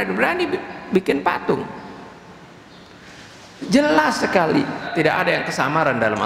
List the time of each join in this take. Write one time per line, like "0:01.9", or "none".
0:04.8